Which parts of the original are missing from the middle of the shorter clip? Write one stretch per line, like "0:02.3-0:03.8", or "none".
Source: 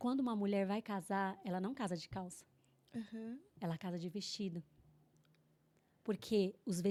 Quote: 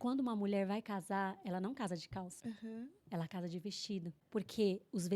0:02.3-0:02.8
0:04.7-0:05.9